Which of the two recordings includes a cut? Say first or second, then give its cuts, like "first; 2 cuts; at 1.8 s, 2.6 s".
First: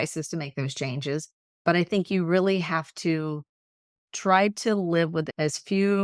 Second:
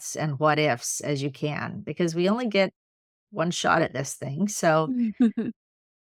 first; 2 cuts; at 1.6 s, 5.3 s